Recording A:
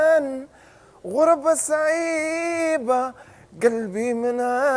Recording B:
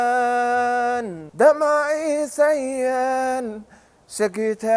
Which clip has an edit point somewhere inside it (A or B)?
B